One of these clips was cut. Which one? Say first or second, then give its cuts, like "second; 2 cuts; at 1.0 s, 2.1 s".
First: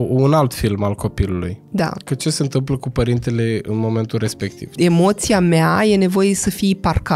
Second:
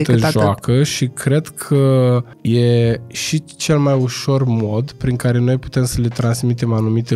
first; 1 cut; at 4.7 s